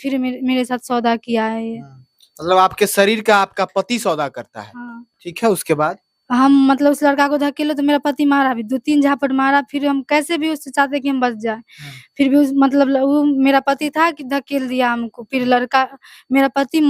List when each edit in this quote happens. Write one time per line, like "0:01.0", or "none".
none